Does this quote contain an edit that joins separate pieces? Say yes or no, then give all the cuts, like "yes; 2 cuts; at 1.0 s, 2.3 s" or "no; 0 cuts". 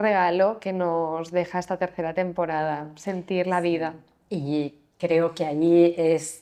no; 0 cuts